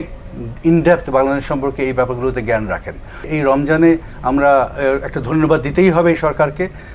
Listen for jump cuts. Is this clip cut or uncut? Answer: cut